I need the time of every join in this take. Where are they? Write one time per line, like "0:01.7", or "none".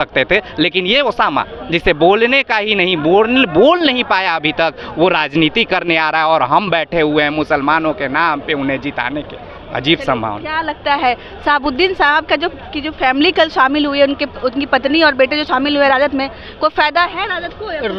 none